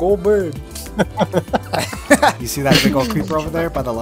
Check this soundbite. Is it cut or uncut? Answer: cut